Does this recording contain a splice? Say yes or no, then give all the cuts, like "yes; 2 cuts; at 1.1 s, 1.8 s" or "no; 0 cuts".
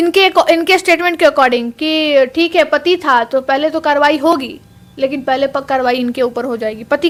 no; 0 cuts